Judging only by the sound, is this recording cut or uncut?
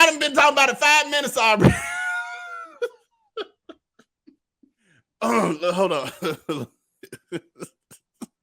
cut